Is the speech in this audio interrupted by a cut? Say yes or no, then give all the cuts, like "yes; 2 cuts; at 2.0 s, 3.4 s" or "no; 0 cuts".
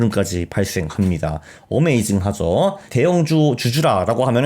yes; 1 cut; at 2.9 s